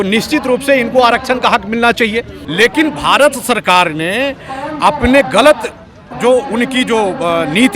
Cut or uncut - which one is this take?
cut